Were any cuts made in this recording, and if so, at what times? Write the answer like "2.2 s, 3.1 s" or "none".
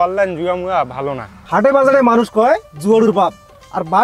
1.3 s